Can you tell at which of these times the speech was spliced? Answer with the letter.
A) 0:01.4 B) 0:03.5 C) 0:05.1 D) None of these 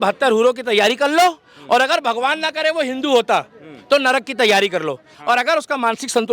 C